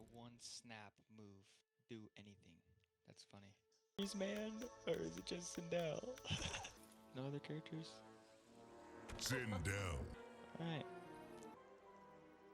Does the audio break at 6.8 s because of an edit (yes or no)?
yes